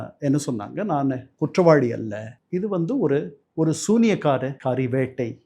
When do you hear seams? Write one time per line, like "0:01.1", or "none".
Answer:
0:04.6